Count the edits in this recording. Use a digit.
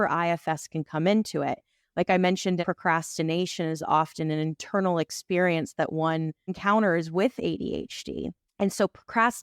2